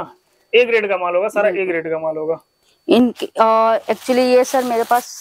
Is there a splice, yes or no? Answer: no